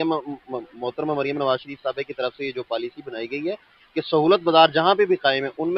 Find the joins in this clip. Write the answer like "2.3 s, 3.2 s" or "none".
none